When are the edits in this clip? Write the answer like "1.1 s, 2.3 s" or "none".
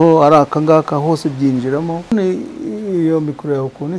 2.1 s